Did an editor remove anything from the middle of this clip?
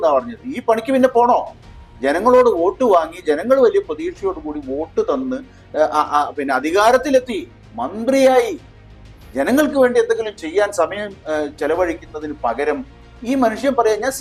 no; 0 cuts

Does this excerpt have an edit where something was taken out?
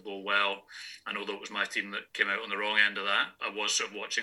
yes; 2 cuts; at 2.0 s, 3.4 s

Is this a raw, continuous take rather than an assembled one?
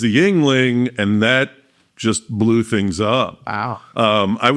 yes; 0 cuts

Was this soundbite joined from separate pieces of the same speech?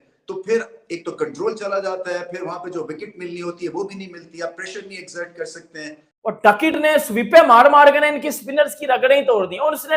yes; 1 cut; at 6.1 s

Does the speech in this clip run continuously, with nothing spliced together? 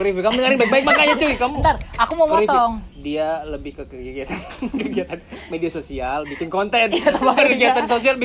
yes; 0 cuts

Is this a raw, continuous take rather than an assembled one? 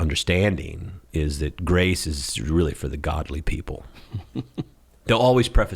no; 1 cut; at 4.8 s

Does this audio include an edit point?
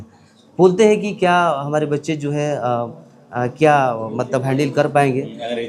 no; 0 cuts

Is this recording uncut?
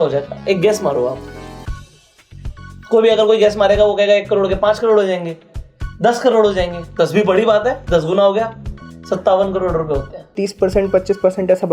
no; 1 cut; at 10.3 s

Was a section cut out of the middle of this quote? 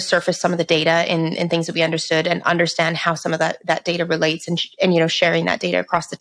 no; 0 cuts

